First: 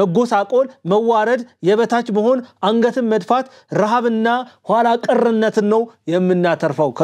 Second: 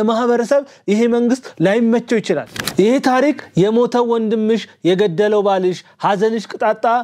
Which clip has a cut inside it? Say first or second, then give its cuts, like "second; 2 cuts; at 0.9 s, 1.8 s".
second; 1 cut; at 2.6 s